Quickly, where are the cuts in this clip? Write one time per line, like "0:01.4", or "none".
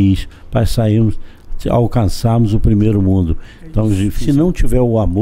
0:04.2